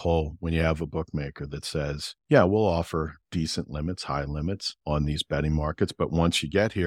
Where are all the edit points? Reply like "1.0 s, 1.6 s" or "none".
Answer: 2.1 s, 3.2 s, 4.7 s